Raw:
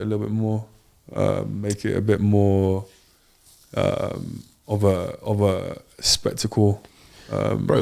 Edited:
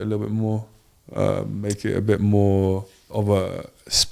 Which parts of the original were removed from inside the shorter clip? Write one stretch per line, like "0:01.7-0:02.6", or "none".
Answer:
0:03.0-0:05.2